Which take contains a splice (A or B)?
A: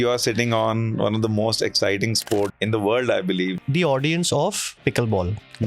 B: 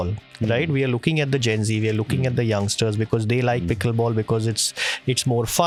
A